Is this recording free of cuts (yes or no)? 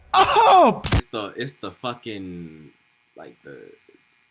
no